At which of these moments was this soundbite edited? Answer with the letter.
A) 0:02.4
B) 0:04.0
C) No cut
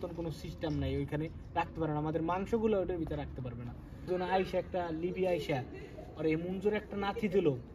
B